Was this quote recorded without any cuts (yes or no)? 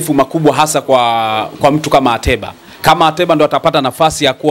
yes